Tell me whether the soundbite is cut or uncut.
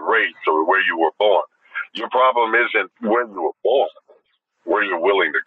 cut